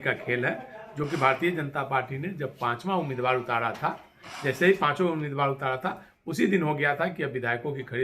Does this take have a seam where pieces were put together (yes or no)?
no